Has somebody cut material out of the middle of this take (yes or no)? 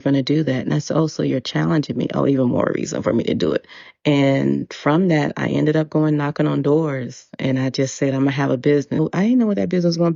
no